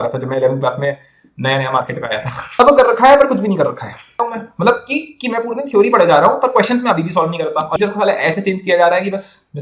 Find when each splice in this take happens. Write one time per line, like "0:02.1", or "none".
0:02.6
0:04.2
0:07.8